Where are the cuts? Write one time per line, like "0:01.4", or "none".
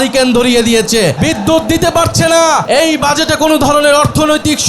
0:01.2
0:02.6